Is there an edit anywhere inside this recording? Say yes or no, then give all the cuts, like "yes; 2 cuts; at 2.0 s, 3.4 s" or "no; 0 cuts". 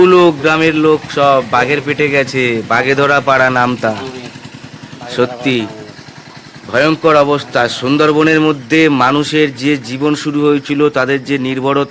no; 0 cuts